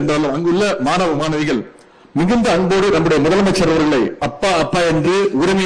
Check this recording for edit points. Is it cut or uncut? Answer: uncut